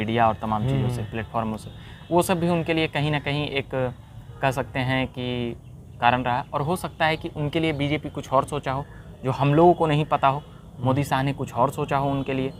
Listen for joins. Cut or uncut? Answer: uncut